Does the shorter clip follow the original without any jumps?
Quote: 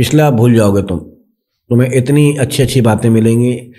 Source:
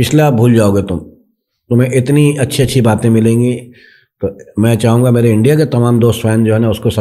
yes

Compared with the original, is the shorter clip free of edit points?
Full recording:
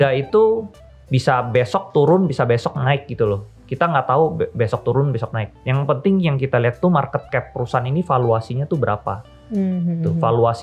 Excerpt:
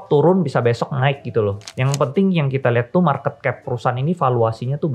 no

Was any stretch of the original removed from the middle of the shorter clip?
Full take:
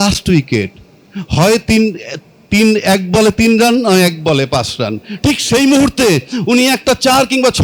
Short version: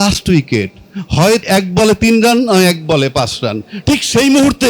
yes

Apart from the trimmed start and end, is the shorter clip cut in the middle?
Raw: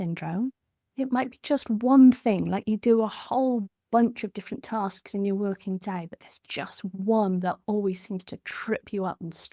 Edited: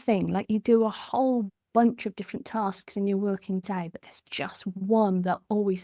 no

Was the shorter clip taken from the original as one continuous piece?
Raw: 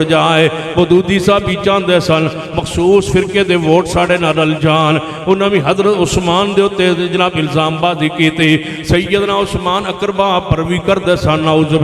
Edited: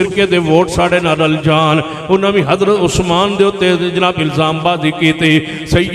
yes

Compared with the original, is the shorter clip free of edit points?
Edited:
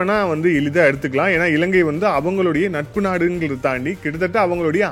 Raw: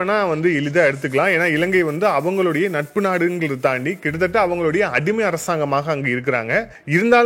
yes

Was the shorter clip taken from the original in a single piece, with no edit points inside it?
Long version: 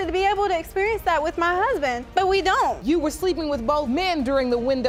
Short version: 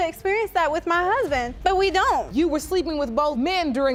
yes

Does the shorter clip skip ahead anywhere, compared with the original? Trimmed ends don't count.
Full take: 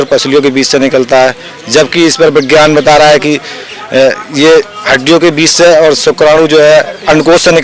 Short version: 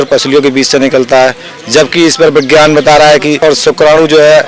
yes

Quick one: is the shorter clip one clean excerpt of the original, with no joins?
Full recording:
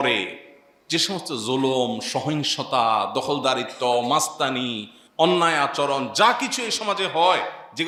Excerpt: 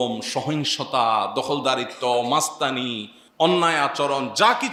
yes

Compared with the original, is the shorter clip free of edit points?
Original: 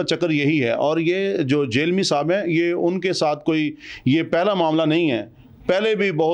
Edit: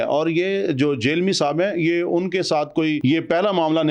no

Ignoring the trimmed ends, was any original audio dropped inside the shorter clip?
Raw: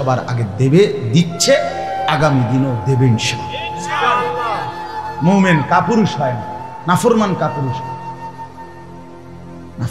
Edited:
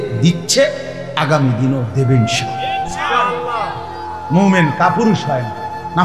no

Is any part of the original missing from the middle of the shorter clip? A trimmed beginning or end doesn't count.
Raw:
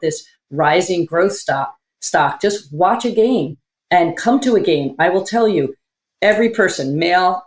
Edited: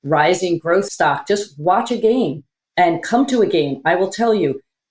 yes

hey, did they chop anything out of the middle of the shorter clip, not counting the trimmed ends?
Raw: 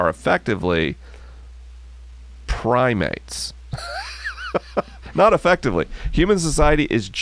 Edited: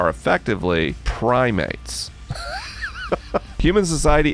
yes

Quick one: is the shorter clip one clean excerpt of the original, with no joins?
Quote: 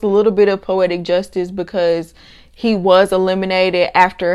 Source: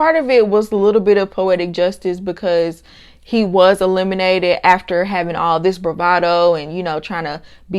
yes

